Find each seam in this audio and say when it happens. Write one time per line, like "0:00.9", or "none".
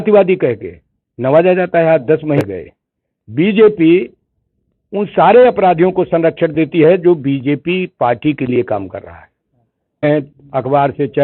0:02.4
0:10.1